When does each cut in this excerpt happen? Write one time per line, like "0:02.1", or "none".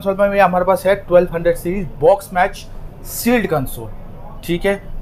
none